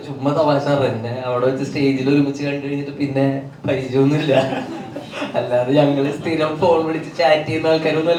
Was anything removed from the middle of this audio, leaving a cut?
no; 0 cuts

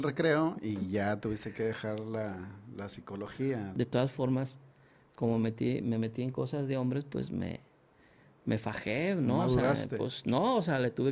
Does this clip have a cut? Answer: yes; 1 cut; at 3.7 s

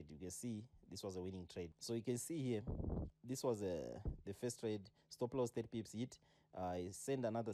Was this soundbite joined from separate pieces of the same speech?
yes; 1 cut; at 1.8 s

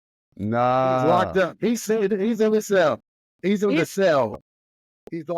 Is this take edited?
no; 0 cuts

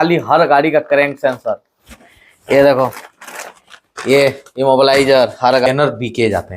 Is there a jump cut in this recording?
yes; 1 cut; at 5.7 s

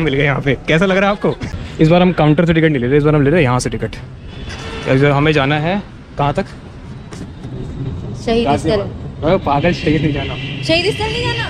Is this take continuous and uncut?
no; 1 cut; at 1.5 s

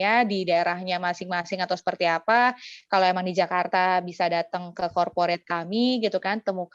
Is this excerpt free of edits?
yes; 0 cuts

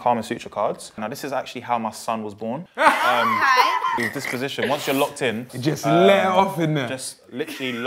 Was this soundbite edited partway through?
yes; 2 cuts; at 1.0 s, 5.5 s

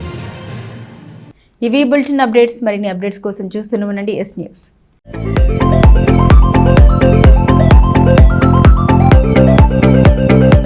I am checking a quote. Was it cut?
no; 0 cuts

